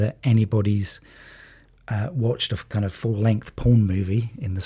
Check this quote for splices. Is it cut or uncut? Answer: uncut